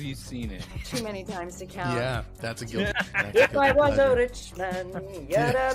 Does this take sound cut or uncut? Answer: cut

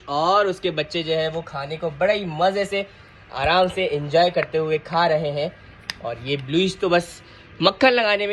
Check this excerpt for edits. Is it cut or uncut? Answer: uncut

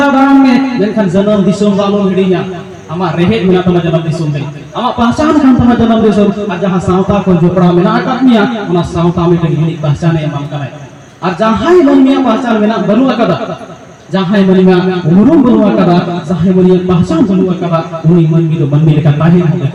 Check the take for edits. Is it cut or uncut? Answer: uncut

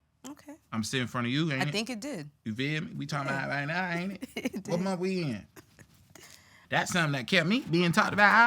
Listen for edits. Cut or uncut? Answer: cut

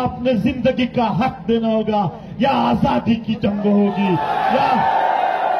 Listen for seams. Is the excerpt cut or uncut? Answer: uncut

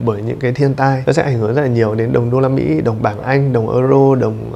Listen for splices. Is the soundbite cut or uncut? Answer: cut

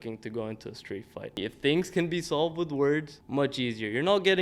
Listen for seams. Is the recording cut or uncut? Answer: cut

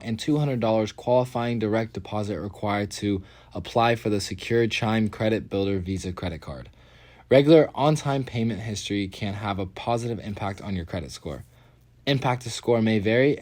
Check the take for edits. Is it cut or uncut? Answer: uncut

